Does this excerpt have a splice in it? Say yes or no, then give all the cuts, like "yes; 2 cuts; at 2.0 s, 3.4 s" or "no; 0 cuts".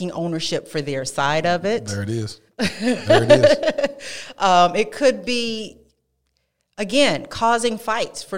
no; 0 cuts